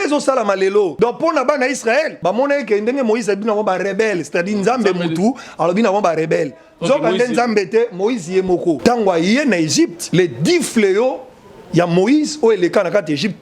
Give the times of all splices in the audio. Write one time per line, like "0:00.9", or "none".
0:00.9
0:02.1
0:08.8
0:10.0